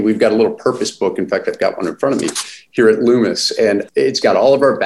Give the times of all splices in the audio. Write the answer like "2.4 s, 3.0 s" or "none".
3.8 s